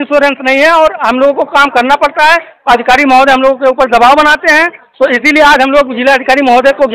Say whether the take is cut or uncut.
uncut